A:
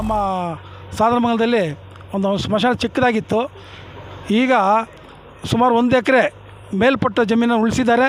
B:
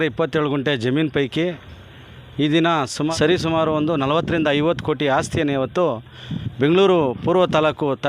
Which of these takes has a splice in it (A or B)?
B